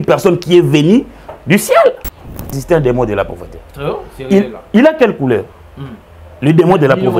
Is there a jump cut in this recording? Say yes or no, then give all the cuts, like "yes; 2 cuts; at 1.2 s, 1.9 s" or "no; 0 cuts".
yes; 1 cut; at 2.6 s